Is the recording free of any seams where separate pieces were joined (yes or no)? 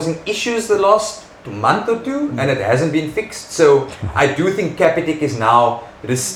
yes